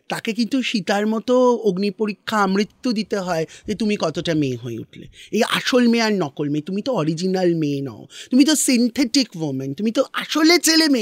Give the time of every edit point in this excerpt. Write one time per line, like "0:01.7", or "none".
none